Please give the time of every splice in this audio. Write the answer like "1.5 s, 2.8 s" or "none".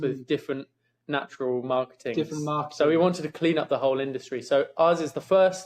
none